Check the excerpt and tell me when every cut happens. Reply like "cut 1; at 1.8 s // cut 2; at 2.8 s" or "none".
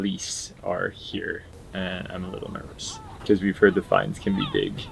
cut 1; at 1.5 s // cut 2; at 3.1 s

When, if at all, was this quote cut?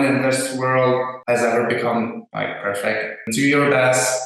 cut 1; at 1.1 s // cut 2; at 2.2 s // cut 3; at 3.3 s

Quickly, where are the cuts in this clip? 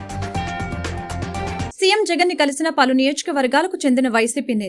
cut 1; at 1.7 s

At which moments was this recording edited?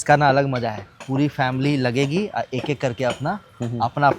cut 1; at 0.9 s

